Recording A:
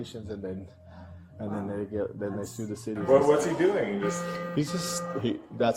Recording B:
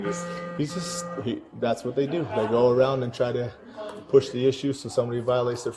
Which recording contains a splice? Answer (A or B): A